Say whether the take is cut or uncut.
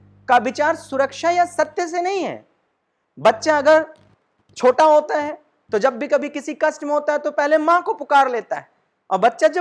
uncut